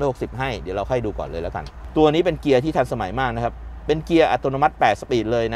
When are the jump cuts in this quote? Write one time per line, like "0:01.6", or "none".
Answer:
0:01.8